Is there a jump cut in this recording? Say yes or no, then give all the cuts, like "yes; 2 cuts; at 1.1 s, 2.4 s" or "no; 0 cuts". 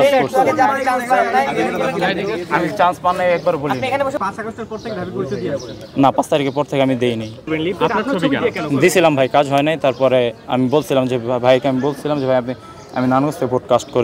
yes; 2 cuts; at 4.2 s, 7.5 s